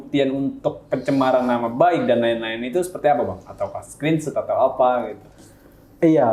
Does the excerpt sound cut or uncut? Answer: uncut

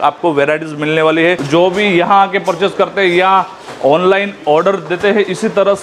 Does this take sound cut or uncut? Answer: cut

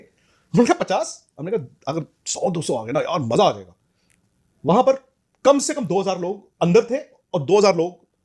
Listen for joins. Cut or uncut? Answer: uncut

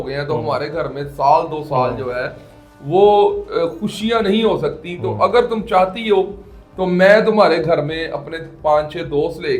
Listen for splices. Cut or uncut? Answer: uncut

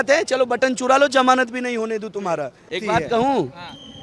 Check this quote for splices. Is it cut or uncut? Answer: cut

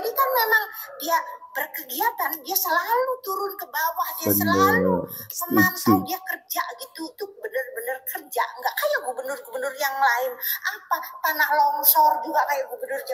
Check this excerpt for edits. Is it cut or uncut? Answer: uncut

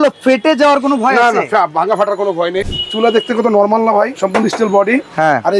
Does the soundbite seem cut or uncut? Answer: cut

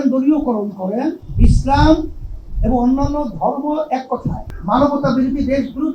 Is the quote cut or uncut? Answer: cut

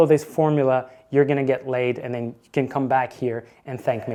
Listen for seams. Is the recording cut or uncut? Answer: uncut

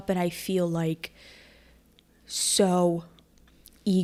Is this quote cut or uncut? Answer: uncut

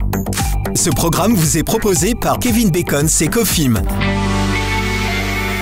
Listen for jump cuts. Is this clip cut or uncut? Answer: uncut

